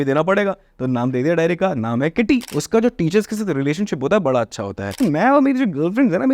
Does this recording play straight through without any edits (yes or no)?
no